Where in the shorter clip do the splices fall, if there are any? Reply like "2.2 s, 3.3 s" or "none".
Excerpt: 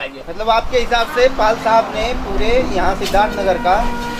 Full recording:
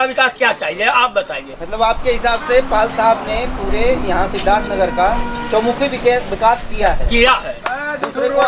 none